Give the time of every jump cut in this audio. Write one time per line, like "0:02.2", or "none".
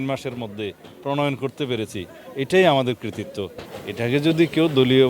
0:03.5